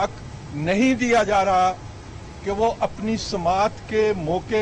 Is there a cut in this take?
no; 0 cuts

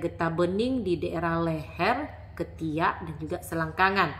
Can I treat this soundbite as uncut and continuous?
yes; 0 cuts

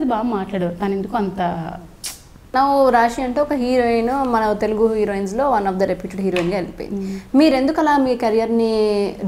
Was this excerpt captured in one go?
no; 1 cut; at 2.5 s

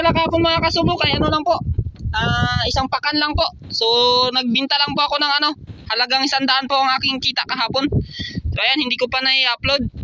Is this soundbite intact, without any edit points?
yes; 0 cuts

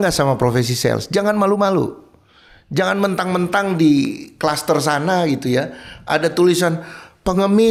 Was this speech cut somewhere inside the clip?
no; 0 cuts

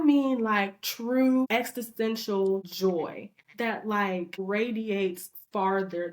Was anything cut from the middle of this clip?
yes; 3 cuts; at 1.5 s, 2.7 s, 4.4 s

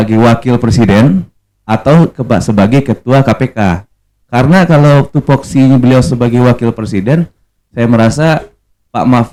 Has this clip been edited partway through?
no; 0 cuts

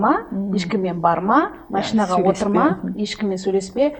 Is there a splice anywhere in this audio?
no; 0 cuts

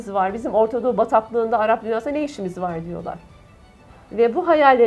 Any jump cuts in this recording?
no; 0 cuts

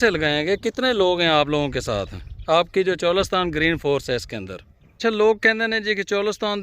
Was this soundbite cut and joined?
yes; 1 cut; at 5.0 s

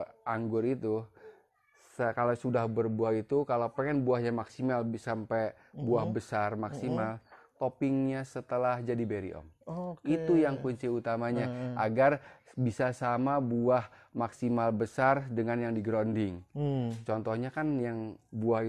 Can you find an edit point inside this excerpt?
no; 0 cuts

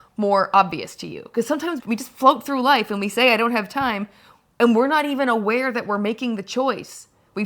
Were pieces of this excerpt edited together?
yes; 1 cut; at 1.8 s

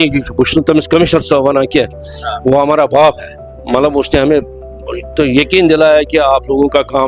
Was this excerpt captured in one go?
yes; 0 cuts

